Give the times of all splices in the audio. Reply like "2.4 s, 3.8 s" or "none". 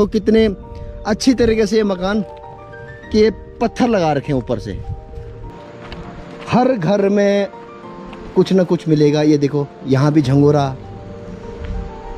5.4 s